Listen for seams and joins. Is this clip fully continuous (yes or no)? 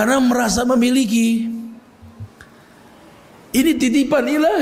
yes